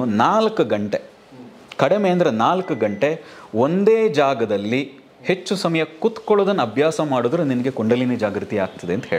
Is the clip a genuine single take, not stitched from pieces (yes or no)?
yes